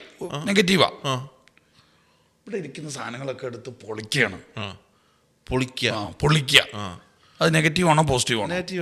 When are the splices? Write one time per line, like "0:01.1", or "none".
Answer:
none

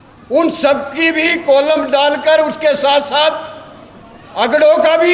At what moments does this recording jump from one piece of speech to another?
none

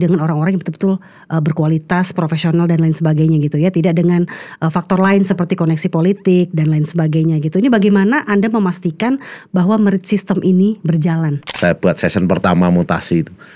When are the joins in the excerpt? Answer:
0:11.5

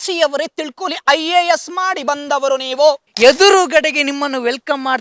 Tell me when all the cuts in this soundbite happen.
0:03.1

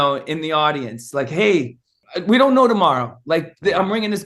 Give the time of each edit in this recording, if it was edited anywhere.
0:02.0

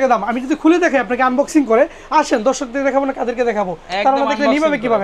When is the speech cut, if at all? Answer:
none

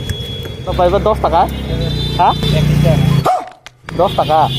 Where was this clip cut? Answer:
0:00.7
0:01.7

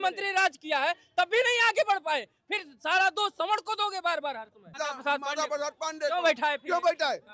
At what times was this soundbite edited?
0:04.7

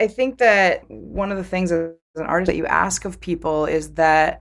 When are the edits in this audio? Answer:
0:00.9

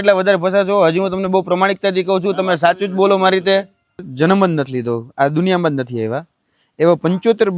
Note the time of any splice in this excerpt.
0:04.0

